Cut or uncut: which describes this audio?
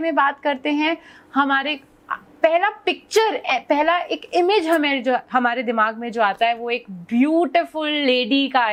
uncut